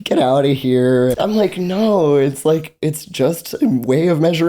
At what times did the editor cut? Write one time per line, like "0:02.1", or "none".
0:01.1